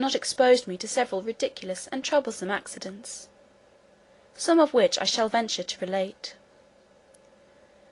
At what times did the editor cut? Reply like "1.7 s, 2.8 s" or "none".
2.4 s